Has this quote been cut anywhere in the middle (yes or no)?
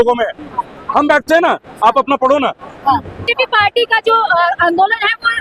yes